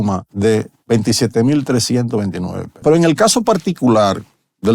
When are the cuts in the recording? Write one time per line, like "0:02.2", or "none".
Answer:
0:02.8